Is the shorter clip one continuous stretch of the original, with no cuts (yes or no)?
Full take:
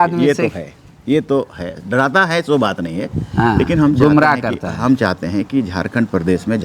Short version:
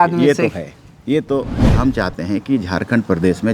no